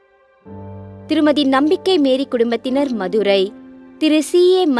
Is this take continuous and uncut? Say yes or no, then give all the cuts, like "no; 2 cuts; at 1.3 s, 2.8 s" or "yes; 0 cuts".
no; 1 cut; at 1.1 s